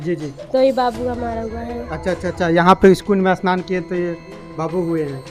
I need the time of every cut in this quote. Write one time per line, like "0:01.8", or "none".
none